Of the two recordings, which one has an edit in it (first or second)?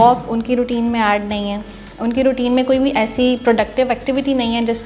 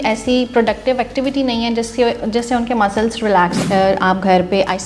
second